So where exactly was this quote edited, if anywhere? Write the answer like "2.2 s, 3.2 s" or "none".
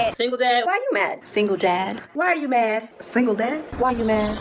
none